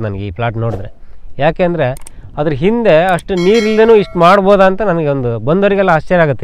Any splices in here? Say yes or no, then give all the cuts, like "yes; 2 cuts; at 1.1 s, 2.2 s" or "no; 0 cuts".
no; 0 cuts